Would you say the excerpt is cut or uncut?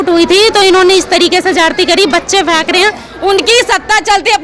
cut